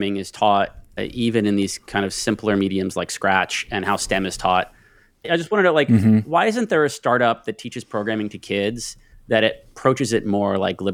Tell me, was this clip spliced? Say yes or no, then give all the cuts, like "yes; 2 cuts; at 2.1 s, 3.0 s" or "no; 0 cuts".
yes; 1 cut; at 5.1 s